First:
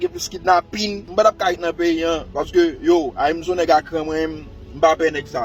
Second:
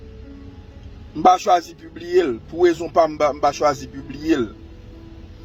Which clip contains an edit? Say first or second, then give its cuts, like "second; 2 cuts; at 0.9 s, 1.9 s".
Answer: first; 1 cut; at 1.0 s